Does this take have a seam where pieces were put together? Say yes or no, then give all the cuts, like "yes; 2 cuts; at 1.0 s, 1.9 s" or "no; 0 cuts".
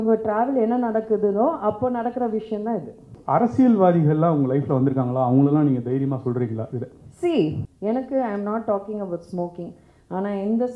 yes; 2 cuts; at 3.1 s, 7.7 s